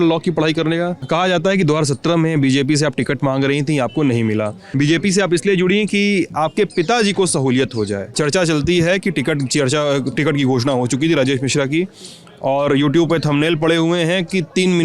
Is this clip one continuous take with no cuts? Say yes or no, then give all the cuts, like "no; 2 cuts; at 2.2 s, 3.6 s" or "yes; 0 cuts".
no; 3 cuts; at 1.0 s, 4.6 s, 8.1 s